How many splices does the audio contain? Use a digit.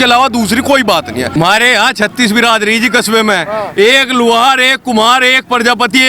1